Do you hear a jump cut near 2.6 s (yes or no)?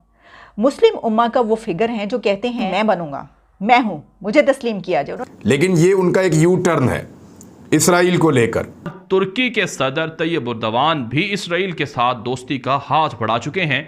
yes